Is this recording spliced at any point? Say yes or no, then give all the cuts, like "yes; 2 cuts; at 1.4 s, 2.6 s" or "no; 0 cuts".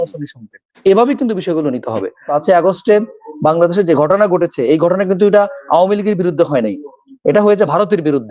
yes; 1 cut; at 2.3 s